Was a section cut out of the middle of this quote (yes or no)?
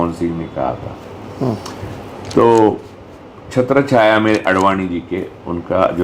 no